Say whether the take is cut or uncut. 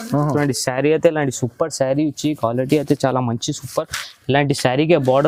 uncut